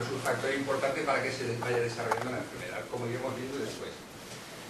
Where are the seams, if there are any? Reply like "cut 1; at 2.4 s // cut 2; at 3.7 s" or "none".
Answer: cut 1; at 1.2 s